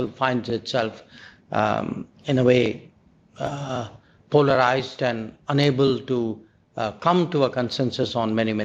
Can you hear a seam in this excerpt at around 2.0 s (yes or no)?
no